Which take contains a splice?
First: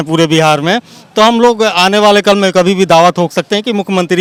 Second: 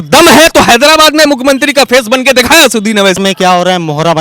second; 1 cut; at 3.2 s

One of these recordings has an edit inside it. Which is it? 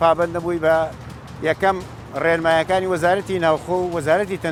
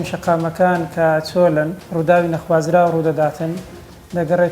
second; 1 cut; at 1.8 s

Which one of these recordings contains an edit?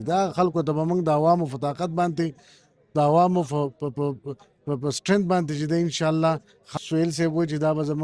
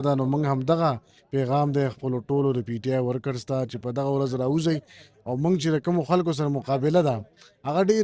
first; 1 cut; at 6.7 s

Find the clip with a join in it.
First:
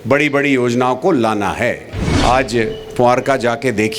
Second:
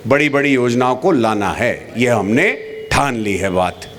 first; 1 cut; at 1.9 s

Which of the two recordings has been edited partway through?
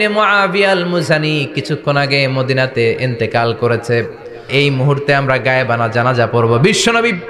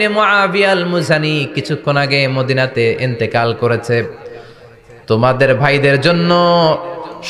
first; 1 cut; at 4.5 s

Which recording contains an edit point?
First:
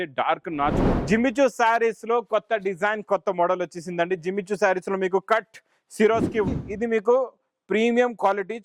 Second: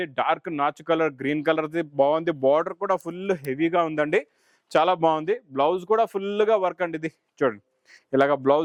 first; 2 cuts; at 0.8 s, 6.5 s

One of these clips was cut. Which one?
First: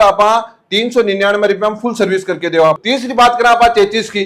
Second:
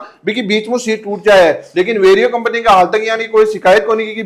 first; 1 cut; at 2.8 s

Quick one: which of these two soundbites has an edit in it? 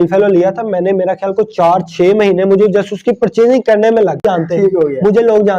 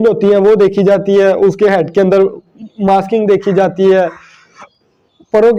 first; 1 cut; at 4.2 s

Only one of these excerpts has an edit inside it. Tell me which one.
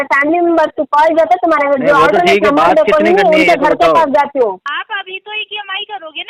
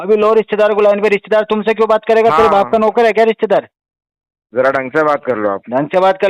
first; 1 cut; at 4.6 s

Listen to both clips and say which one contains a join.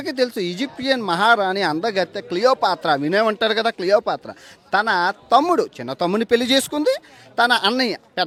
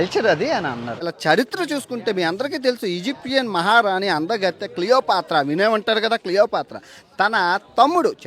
second; 1 cut; at 1.1 s

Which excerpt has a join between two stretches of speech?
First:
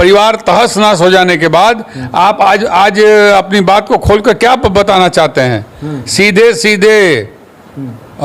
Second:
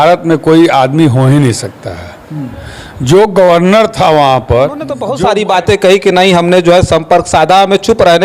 second; 1 cut; at 5.0 s

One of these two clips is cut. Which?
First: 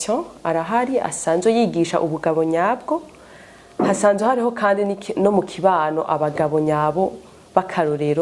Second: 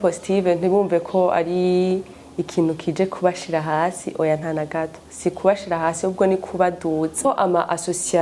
second; 1 cut; at 7.2 s

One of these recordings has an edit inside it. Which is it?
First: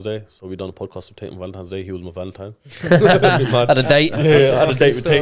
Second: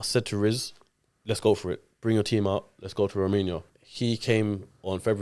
second; 1 cut; at 3.7 s

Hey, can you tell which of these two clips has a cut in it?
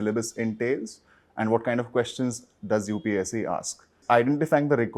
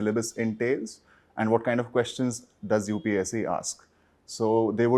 first; 1 cut; at 4.0 s

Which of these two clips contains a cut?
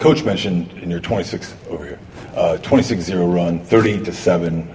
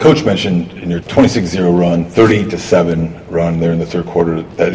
second; 1 cut; at 1.0 s

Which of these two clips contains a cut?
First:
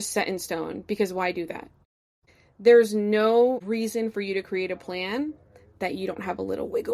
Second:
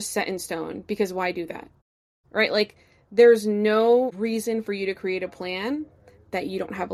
first; 1 cut; at 2.2 s

